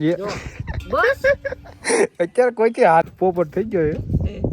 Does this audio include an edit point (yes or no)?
yes